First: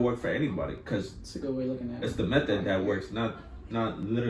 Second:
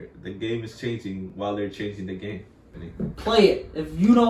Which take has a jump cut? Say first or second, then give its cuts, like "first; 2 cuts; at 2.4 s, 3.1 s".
second; 1 cut; at 2.8 s